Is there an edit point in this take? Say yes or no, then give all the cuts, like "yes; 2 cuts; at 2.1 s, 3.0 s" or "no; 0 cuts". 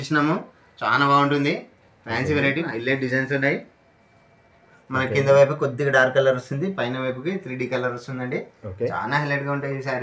yes; 2 cuts; at 2.7 s, 4.7 s